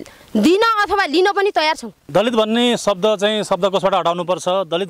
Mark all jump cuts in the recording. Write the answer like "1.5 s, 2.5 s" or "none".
1.9 s